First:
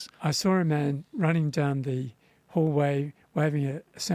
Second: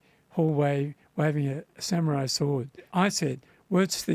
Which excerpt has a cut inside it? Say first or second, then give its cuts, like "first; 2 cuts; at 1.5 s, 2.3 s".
second; 1 cut; at 2.9 s